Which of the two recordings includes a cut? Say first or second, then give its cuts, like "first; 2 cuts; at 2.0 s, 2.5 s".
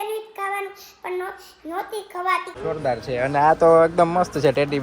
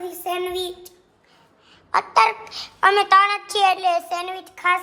first; 1 cut; at 2.5 s